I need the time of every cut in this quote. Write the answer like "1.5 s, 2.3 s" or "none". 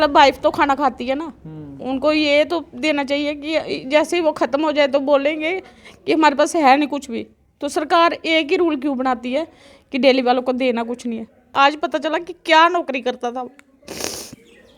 11.5 s